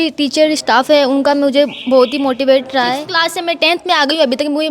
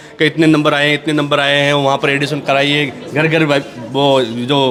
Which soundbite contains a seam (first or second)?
first